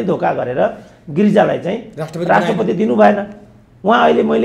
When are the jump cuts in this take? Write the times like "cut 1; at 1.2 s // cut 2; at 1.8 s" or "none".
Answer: none